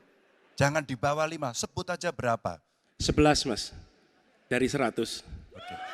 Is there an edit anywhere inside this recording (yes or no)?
no